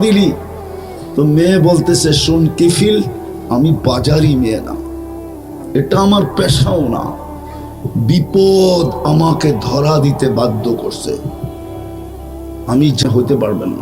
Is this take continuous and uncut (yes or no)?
yes